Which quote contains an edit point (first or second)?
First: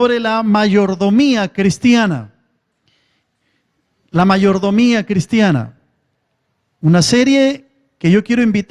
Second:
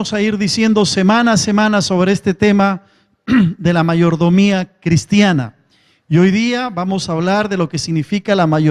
first